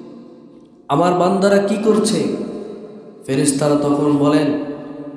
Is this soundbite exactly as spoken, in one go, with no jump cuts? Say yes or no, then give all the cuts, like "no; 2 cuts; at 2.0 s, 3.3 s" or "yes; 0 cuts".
yes; 0 cuts